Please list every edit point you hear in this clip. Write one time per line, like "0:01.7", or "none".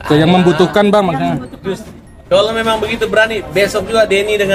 none